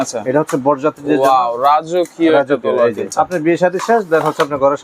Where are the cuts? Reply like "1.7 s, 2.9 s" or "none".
3.1 s